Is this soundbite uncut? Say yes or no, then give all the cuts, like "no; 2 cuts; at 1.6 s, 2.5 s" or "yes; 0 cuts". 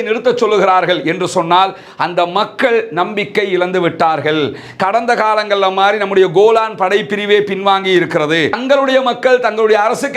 no; 1 cut; at 8.6 s